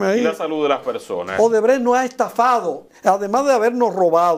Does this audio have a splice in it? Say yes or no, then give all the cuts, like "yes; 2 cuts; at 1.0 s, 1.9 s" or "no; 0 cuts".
yes; 2 cuts; at 1.2 s, 2.8 s